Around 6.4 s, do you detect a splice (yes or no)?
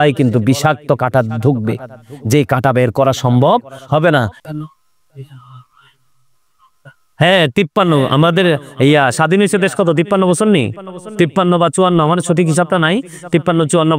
no